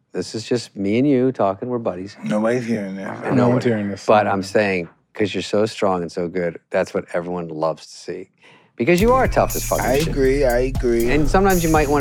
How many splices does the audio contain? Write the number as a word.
one